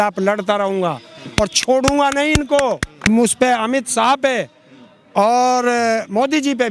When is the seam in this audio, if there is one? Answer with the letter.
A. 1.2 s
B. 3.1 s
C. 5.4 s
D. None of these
B